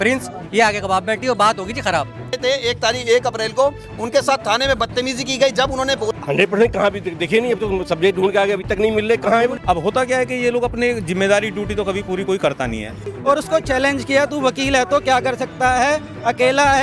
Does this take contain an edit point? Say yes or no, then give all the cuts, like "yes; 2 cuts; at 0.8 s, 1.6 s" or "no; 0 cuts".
yes; 4 cuts; at 2.4 s, 6.1 s, 9.6 s, 13.1 s